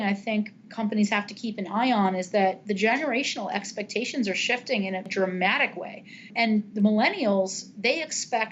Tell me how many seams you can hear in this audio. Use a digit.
2